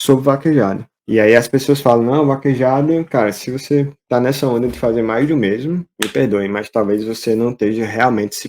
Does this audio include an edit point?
yes; 2 cuts; at 0.9 s, 5.9 s

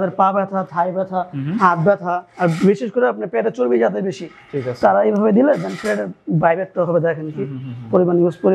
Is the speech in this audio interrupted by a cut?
no; 0 cuts

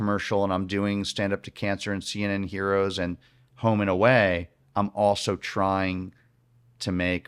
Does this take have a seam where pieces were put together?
no; 0 cuts

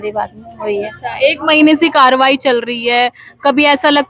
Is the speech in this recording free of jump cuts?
yes; 0 cuts

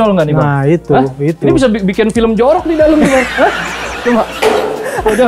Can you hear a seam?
no; 0 cuts

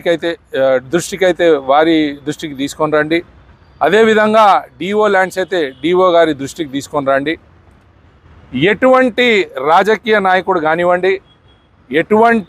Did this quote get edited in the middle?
no; 0 cuts

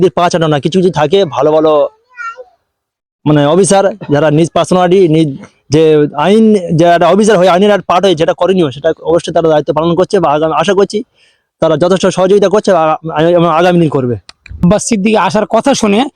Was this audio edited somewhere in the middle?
yes; 1 cut; at 14.6 s

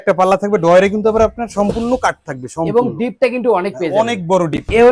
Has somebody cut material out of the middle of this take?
no; 0 cuts

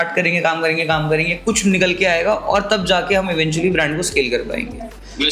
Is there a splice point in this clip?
no; 0 cuts

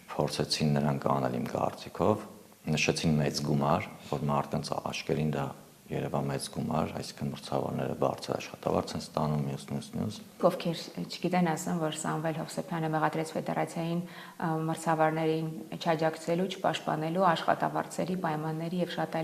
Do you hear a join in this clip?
yes; 1 cut; at 10.4 s

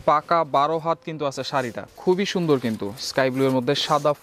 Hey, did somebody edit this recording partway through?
yes; 1 cut; at 1.8 s

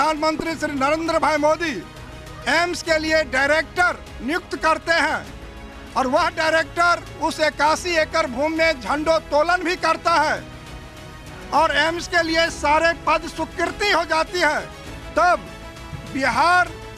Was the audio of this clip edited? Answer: no; 0 cuts

